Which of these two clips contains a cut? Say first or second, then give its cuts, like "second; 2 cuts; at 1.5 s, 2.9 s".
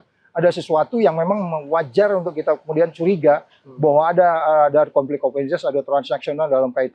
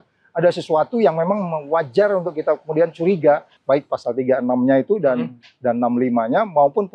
second; 1 cut; at 3.5 s